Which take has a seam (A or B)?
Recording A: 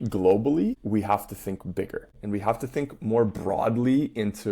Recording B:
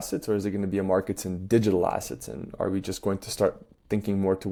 A